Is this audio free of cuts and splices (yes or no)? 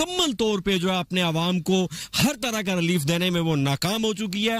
yes